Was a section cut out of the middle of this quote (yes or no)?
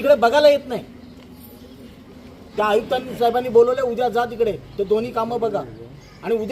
yes